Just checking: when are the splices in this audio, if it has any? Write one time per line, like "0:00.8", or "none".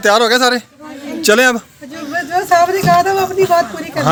none